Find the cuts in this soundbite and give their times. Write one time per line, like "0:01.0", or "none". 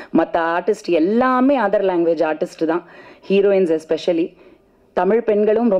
none